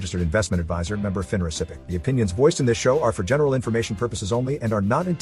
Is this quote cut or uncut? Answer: cut